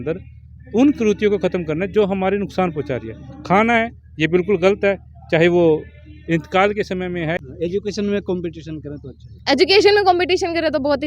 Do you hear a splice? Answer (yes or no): yes